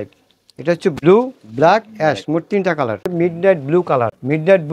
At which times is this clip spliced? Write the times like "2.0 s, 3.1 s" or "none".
3.0 s